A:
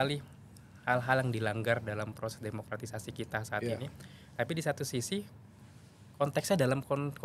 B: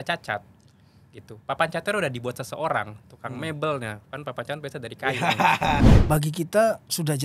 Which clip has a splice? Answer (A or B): B